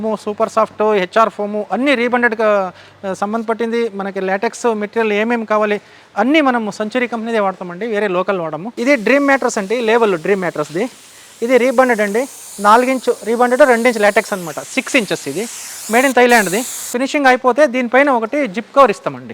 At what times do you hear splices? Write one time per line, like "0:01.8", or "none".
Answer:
0:08.6
0:16.8

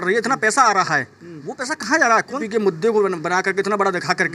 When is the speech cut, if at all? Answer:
0:02.4

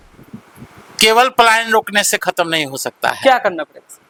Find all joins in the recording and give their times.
none

